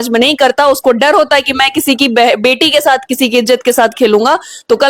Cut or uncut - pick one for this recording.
uncut